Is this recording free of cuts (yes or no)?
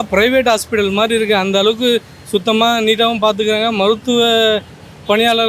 yes